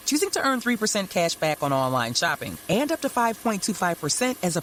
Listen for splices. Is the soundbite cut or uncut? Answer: uncut